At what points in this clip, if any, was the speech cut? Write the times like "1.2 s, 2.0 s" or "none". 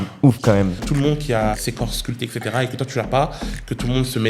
0.8 s, 1.6 s